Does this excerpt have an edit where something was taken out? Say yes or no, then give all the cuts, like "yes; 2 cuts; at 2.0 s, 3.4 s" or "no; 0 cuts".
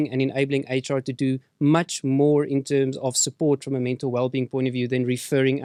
no; 0 cuts